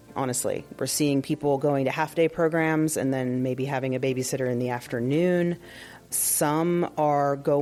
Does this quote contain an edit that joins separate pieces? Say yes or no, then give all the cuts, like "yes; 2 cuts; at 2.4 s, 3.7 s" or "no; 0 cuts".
no; 0 cuts